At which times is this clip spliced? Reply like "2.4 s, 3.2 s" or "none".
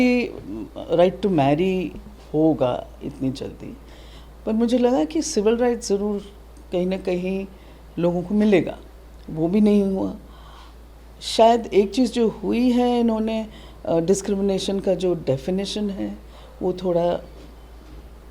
none